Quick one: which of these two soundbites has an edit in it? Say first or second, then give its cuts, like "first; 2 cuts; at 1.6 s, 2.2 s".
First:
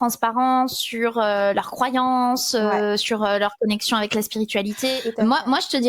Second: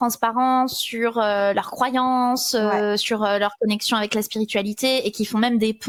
first; 1 cut; at 5.0 s